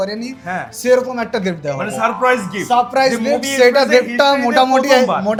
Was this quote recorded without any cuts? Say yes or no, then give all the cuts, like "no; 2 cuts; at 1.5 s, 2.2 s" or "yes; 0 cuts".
yes; 0 cuts